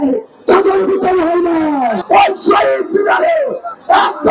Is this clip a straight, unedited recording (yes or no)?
no